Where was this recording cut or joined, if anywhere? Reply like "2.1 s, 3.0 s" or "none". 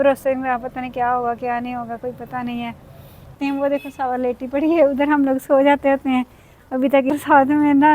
3.4 s, 7.1 s